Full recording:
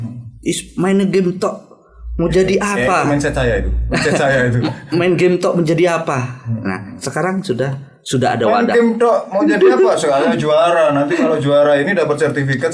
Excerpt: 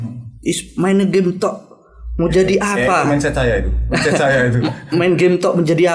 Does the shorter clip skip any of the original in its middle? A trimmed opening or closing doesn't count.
no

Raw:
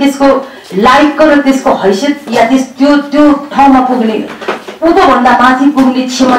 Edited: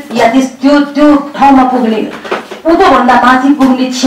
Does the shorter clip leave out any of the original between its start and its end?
no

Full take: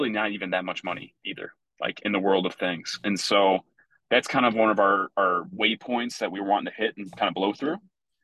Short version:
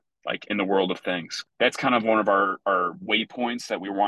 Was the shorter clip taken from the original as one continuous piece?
no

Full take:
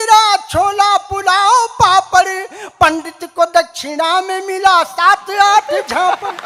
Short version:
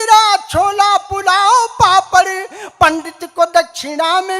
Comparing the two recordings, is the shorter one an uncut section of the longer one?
yes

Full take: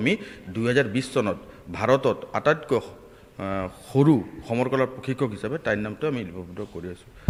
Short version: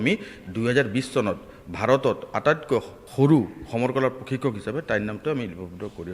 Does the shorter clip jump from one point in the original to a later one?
yes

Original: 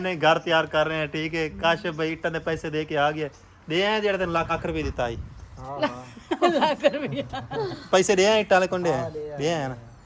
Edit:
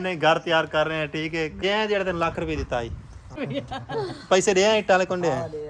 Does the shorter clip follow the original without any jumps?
no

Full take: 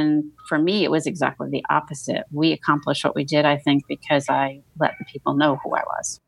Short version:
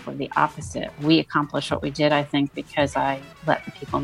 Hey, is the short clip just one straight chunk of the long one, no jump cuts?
yes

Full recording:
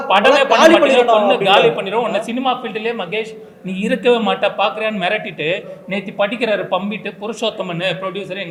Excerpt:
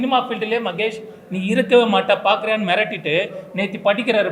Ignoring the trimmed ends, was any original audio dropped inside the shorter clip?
no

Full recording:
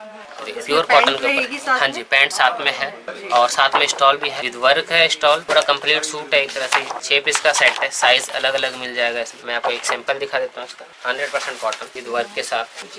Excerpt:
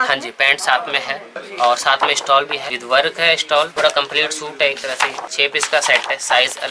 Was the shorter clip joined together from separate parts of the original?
no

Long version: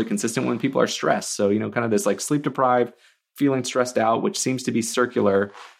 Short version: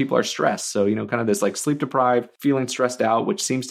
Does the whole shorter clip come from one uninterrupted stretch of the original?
no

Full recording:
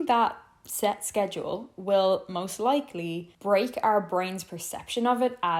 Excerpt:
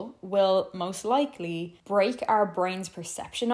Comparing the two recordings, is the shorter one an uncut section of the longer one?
yes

